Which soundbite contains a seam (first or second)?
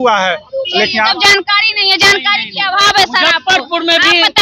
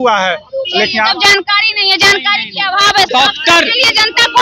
second